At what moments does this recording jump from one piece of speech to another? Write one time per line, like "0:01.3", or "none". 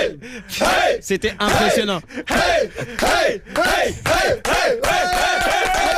none